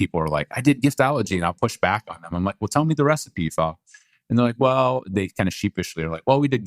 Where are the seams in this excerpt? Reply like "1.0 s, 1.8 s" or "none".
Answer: none